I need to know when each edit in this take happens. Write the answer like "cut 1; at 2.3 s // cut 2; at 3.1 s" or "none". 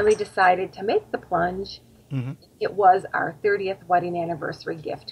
cut 1; at 2.0 s